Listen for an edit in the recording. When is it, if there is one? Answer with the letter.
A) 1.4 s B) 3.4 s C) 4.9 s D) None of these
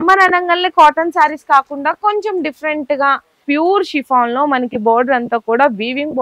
B